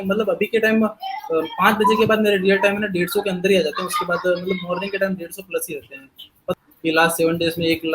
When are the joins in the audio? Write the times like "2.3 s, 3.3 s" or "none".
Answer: 6.5 s